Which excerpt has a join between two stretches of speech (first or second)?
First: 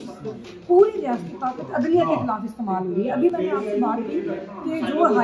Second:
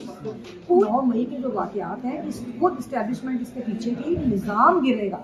second